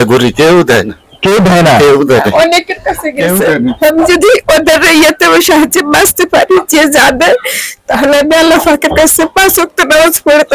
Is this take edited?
no; 0 cuts

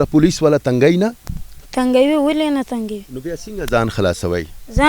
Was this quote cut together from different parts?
no; 0 cuts

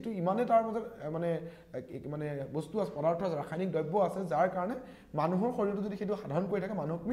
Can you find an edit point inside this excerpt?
no; 0 cuts

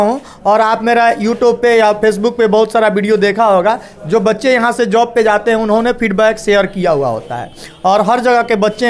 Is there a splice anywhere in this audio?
no; 0 cuts

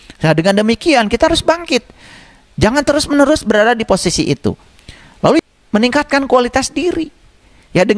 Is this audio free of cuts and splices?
no; 1 cut; at 5.4 s

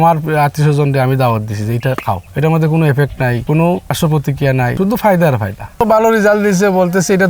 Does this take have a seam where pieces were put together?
yes; 1 cut; at 5.6 s

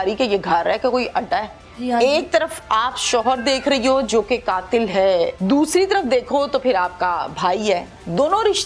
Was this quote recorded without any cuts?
no; 2 cuts; at 1.6 s, 5.4 s

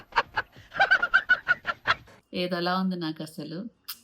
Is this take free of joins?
no; 1 cut; at 2.1 s

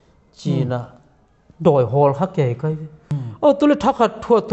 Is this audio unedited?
no; 1 cut; at 3.0 s

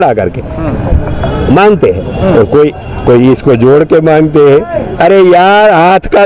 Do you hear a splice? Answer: no; 0 cuts

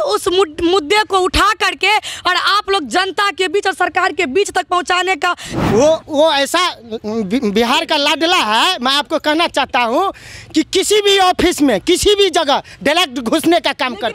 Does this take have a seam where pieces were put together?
yes; 1 cut; at 5.5 s

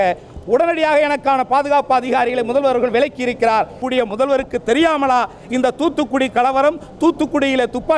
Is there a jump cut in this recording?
yes; 1 cut; at 3.8 s

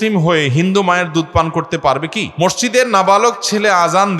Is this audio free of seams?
no; 1 cut; at 2.3 s

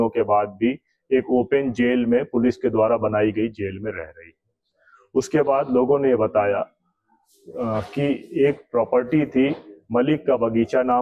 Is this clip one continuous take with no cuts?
yes; 0 cuts

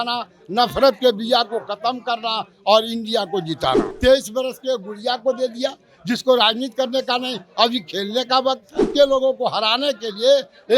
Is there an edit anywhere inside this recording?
yes; 2 cuts; at 3.9 s, 8.9 s

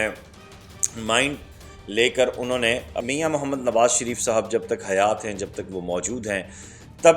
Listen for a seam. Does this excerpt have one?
yes; 1 cut; at 3.0 s

